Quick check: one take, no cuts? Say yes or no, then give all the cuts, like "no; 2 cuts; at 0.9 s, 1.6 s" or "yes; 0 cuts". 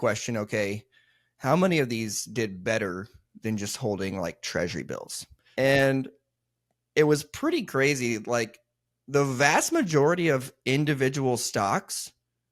no; 1 cut; at 5.5 s